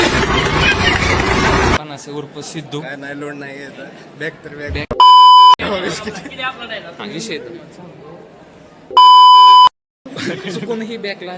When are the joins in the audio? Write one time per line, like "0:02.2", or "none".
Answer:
0:01.8

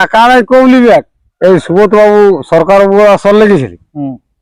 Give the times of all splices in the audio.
0:01.2

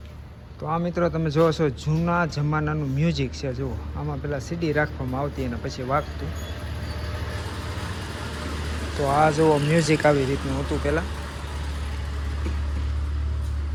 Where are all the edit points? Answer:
none

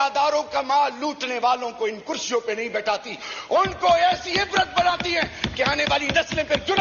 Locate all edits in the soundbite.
none

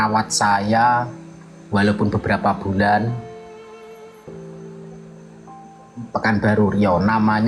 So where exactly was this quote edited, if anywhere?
0:03.2
0:06.0

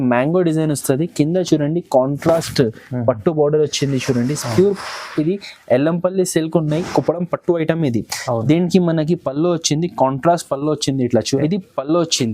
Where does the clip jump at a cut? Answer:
0:11.4

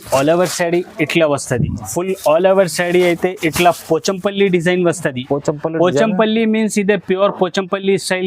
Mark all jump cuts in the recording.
0:01.8

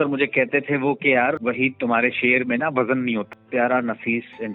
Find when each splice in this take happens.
0:01.4
0:03.2

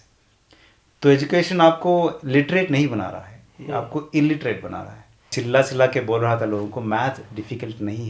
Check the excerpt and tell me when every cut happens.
0:05.4

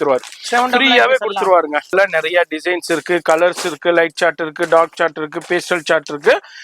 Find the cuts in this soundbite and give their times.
0:01.9

